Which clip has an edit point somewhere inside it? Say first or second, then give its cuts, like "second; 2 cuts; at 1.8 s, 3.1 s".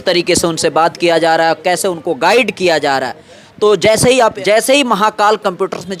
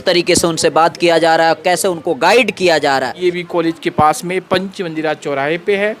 second; 1 cut; at 3.1 s